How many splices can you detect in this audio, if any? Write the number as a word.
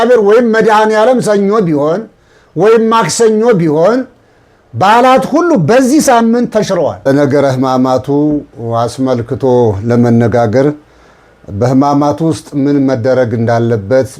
one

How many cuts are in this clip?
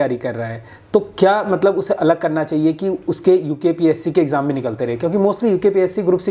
zero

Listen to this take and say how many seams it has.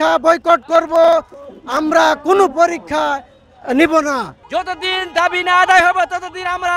one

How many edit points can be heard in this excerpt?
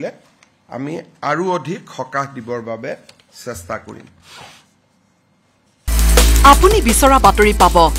one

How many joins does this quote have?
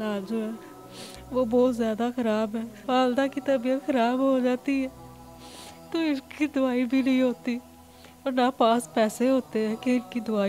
one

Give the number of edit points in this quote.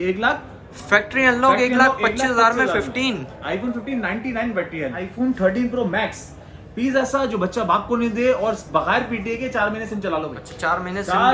two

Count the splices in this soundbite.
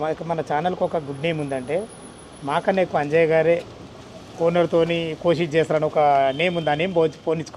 zero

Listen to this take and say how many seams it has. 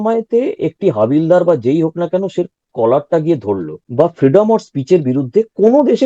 one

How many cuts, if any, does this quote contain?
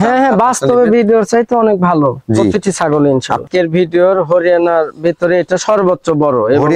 one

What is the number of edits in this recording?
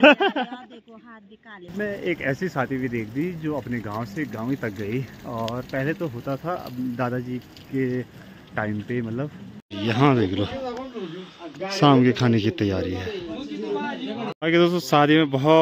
three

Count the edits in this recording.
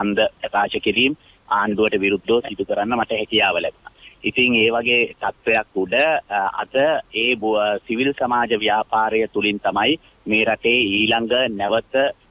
zero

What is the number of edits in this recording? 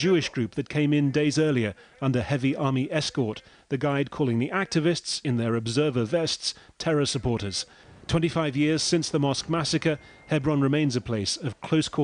one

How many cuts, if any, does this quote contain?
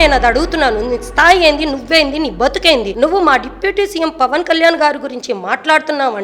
one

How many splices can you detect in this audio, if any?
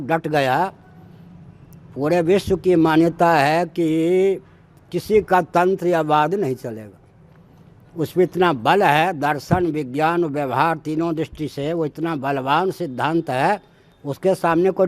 zero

